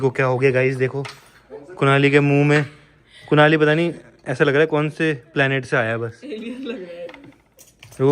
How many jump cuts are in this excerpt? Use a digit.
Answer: 0